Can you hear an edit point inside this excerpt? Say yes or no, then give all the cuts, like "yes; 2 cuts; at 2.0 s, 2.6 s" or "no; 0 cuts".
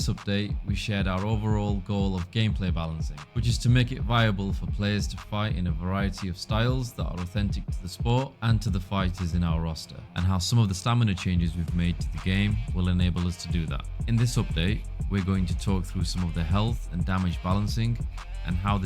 yes; 1 cut; at 4.0 s